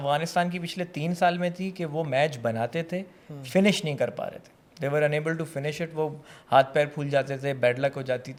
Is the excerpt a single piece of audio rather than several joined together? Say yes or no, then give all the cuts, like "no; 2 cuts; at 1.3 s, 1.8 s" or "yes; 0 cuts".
yes; 0 cuts